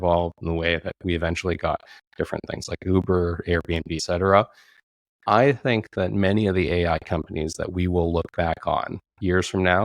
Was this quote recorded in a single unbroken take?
no; 1 cut; at 4.0 s

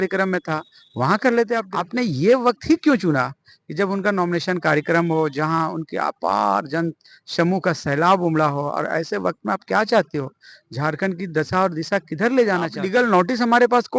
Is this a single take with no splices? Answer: no; 2 cuts; at 1.7 s, 12.8 s

